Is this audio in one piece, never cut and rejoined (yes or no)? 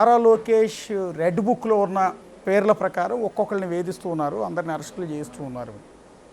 yes